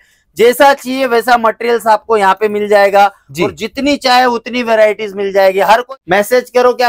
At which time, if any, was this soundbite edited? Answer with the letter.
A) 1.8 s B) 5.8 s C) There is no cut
B